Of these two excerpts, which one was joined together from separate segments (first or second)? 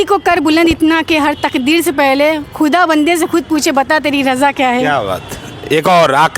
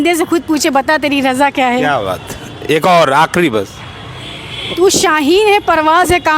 second